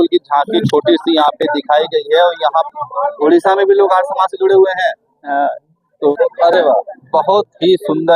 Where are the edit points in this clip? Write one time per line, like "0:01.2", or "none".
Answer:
0:02.7
0:06.1

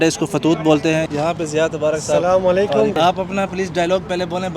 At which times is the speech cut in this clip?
0:01.1
0:03.0

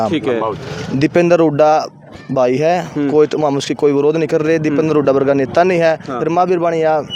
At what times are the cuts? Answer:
none

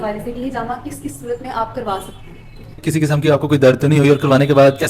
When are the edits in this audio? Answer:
0:02.8

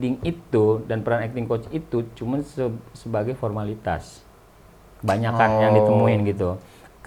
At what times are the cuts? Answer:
none

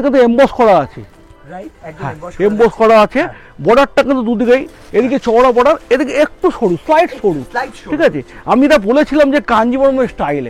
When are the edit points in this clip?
none

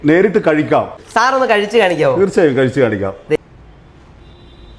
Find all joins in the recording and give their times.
0:01.0
0:03.4

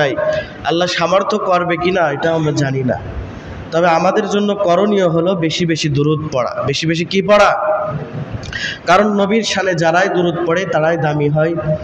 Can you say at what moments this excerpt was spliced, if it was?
none

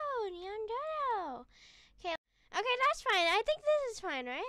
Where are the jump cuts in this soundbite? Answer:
0:02.2

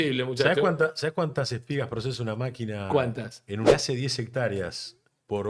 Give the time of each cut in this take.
0:03.7

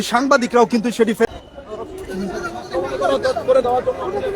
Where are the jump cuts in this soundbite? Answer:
none

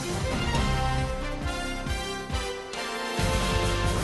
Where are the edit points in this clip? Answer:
0:02.0

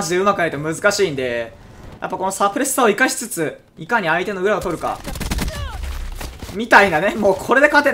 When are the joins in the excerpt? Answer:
none

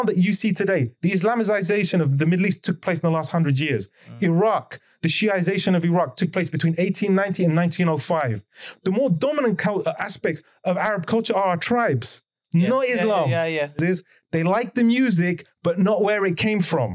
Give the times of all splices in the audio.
0:13.8

